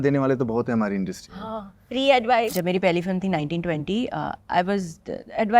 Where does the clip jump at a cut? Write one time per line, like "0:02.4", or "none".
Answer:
0:02.5